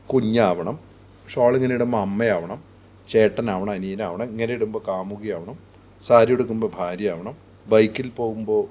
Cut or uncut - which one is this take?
uncut